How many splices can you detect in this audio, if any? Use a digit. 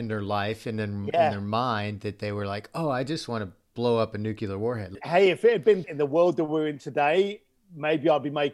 2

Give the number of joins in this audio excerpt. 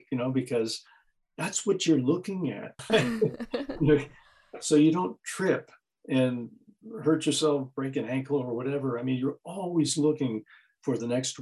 1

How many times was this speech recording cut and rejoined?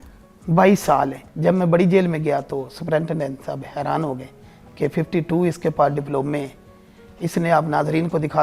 1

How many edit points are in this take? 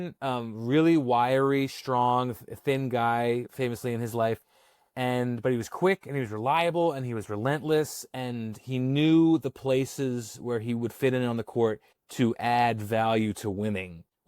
1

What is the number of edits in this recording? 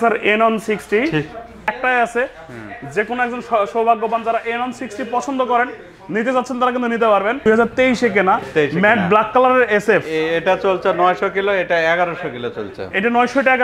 2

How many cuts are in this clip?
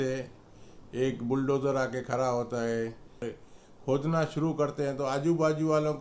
1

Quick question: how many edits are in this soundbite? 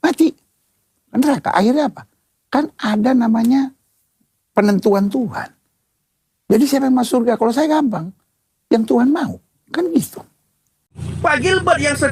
1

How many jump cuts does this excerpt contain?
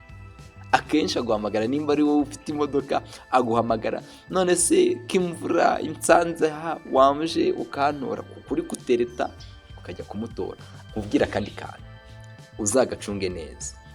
1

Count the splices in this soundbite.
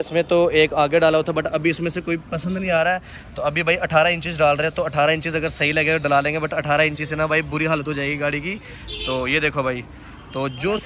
0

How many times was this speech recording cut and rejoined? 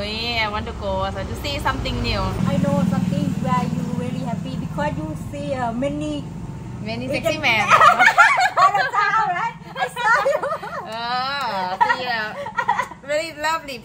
1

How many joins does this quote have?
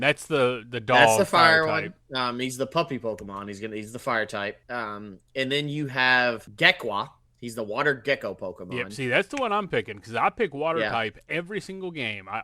2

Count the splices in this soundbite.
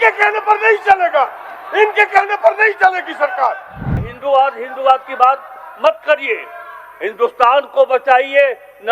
1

